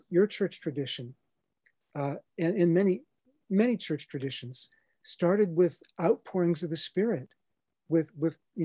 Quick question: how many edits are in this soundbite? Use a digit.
0